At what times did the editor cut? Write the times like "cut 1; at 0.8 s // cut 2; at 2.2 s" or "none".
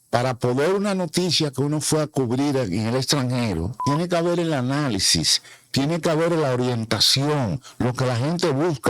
cut 1; at 3.8 s